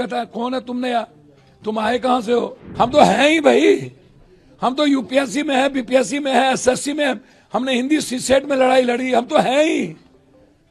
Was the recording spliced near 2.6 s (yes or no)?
yes